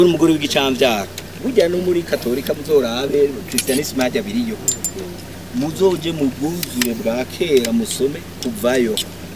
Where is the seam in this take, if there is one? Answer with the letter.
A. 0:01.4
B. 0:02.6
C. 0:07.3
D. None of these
A